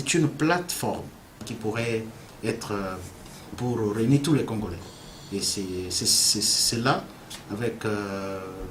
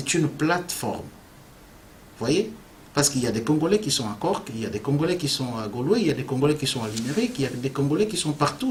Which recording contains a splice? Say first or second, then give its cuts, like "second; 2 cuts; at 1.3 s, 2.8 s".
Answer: first; 1 cut; at 1.5 s